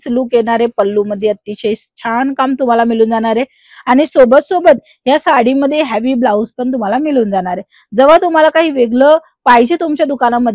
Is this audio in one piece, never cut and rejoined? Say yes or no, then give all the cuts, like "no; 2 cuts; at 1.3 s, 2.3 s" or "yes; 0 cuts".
yes; 0 cuts